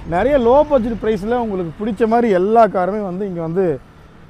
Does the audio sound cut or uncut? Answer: uncut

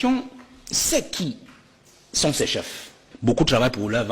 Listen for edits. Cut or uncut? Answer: cut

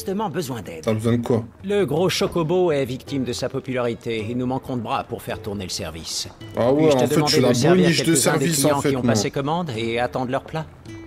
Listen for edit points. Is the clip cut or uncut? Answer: uncut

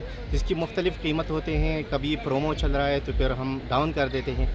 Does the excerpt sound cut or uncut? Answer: uncut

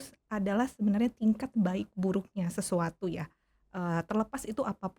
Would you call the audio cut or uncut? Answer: uncut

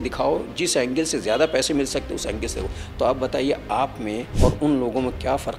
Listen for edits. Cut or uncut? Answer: uncut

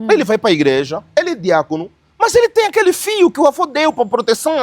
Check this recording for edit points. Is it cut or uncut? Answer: uncut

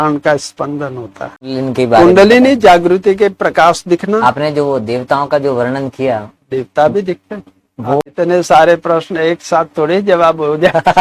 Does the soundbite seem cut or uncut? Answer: cut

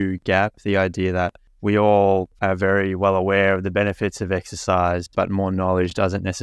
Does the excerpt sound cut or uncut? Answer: cut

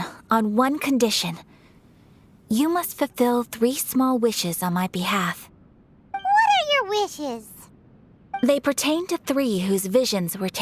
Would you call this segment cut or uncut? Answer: uncut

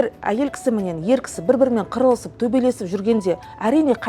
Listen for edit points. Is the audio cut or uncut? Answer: uncut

